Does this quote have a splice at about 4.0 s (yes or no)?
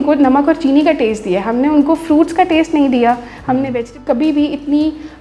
yes